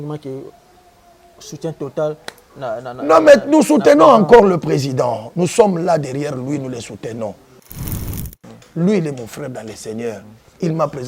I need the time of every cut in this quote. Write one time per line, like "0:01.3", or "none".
0:08.1